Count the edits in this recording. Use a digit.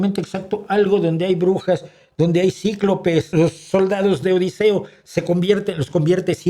1